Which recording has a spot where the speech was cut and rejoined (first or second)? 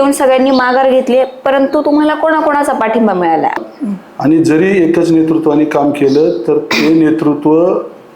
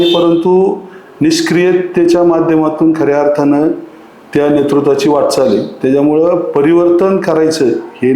first